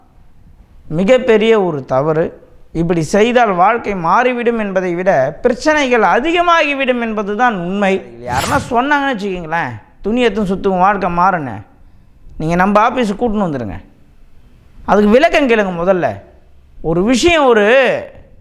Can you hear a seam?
yes; 1 cut; at 8.2 s

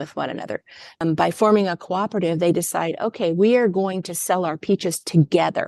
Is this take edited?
yes; 1 cut; at 1.0 s

